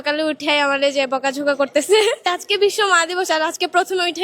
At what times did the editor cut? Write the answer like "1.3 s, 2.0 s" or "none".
2.2 s